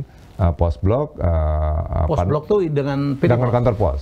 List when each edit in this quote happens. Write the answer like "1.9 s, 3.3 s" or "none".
none